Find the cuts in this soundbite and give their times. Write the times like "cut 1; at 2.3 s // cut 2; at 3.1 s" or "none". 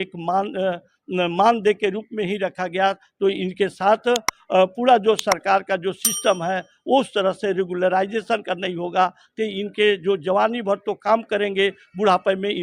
none